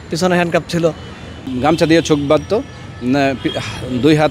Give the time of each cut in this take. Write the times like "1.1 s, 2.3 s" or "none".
1.5 s